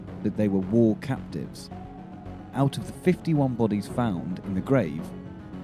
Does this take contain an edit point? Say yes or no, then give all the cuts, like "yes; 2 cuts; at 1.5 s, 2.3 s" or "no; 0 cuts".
yes; 1 cut; at 3.9 s